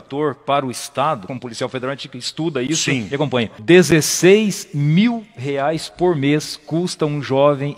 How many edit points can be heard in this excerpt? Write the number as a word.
two